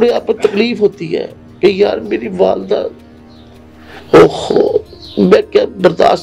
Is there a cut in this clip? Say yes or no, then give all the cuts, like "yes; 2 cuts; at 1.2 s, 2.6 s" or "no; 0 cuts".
no; 0 cuts